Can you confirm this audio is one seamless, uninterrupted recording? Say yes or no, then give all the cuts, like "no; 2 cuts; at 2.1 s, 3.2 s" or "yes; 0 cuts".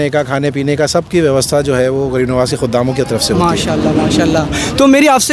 yes; 0 cuts